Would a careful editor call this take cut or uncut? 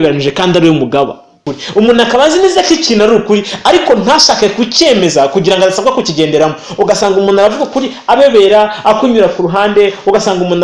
cut